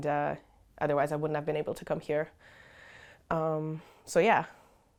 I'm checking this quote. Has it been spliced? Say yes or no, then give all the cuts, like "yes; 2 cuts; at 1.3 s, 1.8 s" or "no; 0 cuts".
no; 0 cuts